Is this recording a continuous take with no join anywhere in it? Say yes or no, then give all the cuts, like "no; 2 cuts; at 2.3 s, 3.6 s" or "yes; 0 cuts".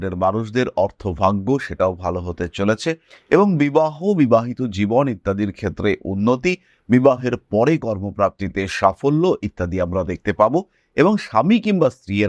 yes; 0 cuts